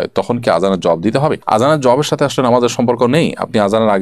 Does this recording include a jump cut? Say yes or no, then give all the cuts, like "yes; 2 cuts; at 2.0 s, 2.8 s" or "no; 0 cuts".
no; 0 cuts